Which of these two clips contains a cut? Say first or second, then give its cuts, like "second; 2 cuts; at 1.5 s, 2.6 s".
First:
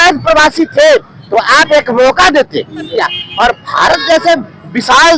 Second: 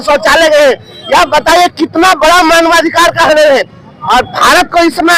first; 1 cut; at 2.9 s